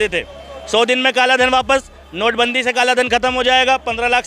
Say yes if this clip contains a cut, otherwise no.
no